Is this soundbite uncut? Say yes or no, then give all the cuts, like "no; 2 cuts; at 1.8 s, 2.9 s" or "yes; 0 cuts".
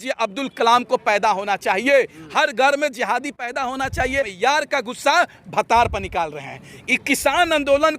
no; 1 cut; at 4.3 s